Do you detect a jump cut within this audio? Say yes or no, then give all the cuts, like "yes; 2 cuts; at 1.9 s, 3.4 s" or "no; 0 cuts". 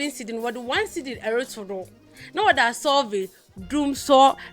no; 0 cuts